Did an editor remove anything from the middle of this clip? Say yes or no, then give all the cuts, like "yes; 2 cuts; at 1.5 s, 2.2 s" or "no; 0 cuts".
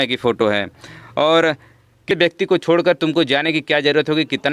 yes; 1 cut; at 2.1 s